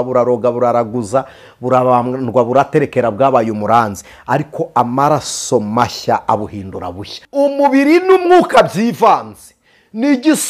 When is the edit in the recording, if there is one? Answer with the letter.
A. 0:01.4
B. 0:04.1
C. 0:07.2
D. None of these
C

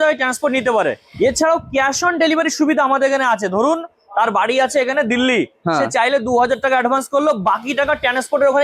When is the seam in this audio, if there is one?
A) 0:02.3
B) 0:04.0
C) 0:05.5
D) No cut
D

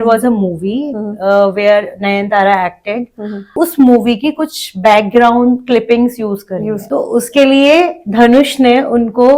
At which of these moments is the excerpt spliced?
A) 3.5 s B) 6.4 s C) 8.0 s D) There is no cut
A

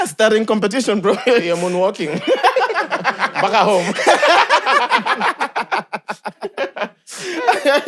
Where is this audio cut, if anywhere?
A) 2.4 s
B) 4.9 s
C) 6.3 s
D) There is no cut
D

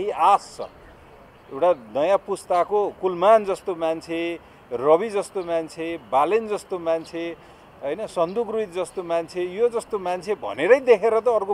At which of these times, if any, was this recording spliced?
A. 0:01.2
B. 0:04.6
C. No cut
C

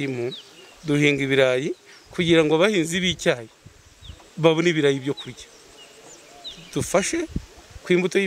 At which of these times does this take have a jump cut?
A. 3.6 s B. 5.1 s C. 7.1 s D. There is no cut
D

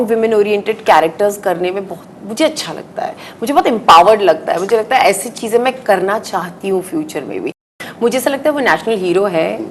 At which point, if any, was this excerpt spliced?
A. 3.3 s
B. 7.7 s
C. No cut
B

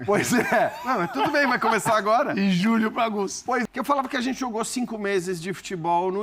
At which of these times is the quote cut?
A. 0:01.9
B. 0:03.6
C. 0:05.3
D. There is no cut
B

